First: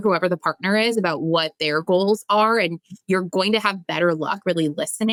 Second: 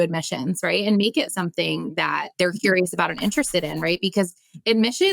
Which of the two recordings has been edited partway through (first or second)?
second